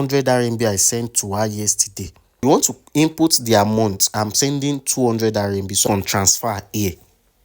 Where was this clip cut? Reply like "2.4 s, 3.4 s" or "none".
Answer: 2.4 s, 5.8 s